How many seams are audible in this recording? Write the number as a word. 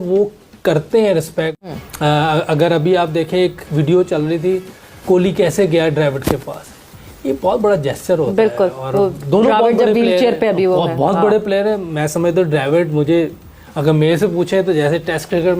one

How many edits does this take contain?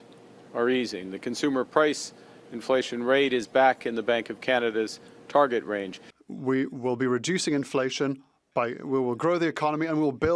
zero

